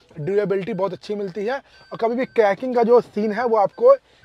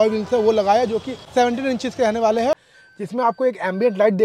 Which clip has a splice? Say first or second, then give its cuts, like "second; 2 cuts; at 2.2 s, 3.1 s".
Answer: second; 2 cuts; at 1.2 s, 2.5 s